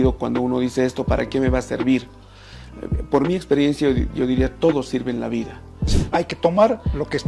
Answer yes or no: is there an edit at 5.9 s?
yes